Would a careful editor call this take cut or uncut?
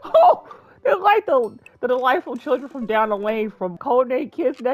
cut